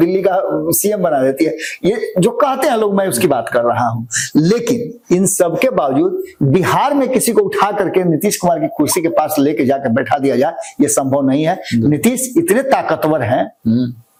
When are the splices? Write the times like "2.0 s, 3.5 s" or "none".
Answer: none